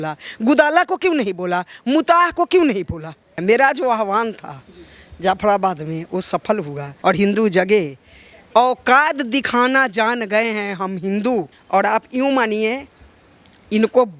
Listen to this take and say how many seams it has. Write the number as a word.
three